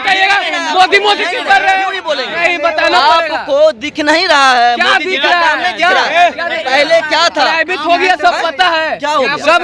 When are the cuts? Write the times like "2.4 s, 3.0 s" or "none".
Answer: none